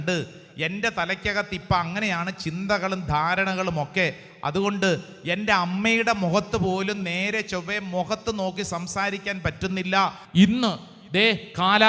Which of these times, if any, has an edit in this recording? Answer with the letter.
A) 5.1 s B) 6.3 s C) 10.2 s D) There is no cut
C